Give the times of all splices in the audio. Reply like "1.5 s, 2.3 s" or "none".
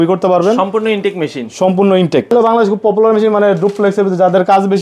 2.3 s